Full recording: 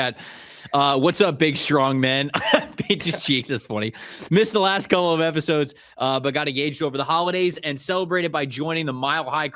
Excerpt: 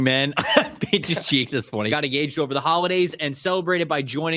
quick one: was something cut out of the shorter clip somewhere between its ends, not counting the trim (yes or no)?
yes